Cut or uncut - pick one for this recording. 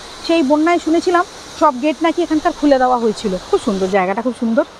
cut